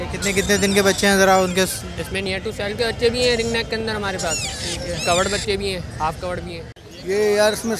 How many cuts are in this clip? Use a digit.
1